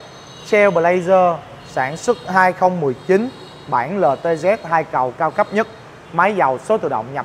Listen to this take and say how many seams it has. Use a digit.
0